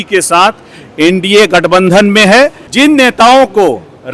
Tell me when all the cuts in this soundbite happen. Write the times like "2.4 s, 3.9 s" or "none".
2.6 s